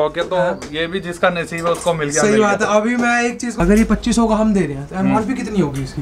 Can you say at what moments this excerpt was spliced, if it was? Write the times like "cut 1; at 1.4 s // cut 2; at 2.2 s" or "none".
cut 1; at 3.5 s